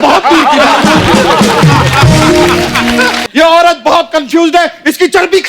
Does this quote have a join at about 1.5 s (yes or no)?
no